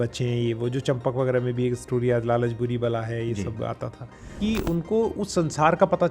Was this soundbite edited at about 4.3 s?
yes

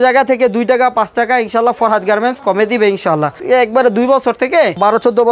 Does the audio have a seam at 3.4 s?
no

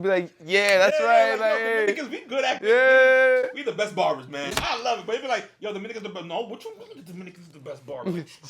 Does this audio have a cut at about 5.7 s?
no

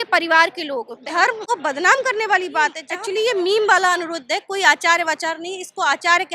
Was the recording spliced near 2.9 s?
yes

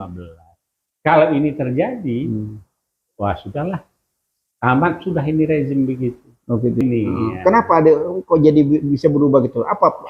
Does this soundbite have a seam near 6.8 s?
yes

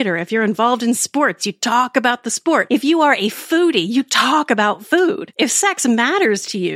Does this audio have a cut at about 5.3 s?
yes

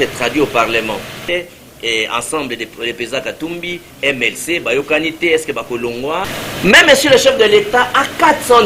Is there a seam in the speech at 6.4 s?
yes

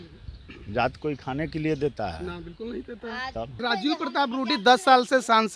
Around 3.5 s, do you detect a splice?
yes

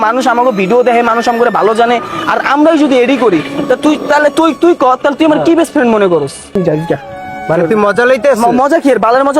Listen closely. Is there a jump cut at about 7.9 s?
no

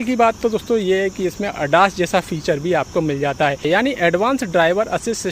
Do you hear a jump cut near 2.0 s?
no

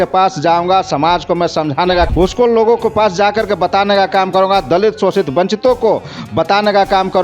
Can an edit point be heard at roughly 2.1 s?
yes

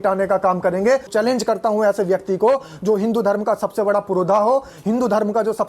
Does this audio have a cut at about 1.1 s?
yes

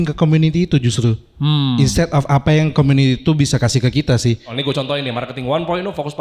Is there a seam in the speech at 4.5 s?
yes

